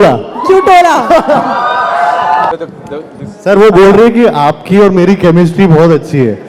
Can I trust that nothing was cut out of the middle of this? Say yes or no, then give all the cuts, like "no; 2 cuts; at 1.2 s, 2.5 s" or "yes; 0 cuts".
no; 1 cut; at 2.5 s